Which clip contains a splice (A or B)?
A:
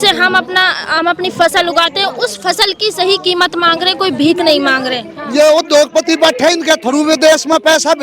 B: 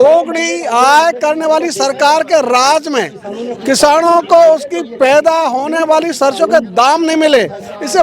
A